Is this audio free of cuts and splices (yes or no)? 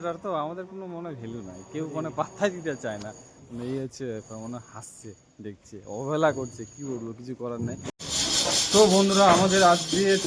no